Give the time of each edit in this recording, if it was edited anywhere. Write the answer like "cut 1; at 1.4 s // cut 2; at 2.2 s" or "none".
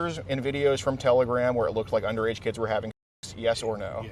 none